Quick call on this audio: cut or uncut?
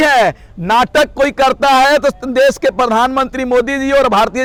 uncut